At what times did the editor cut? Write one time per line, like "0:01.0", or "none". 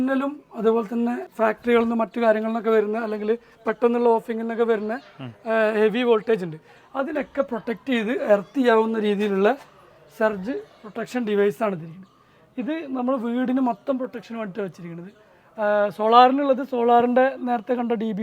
0:01.3